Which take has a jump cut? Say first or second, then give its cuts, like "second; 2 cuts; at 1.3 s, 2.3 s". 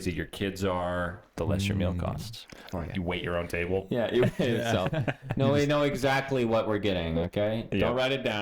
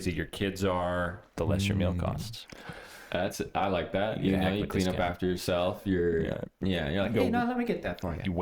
first; 1 cut; at 2.7 s